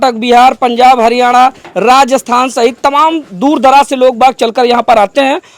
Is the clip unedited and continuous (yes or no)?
yes